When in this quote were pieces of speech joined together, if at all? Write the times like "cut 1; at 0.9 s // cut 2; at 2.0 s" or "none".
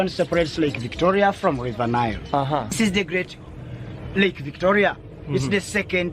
cut 1; at 2.8 s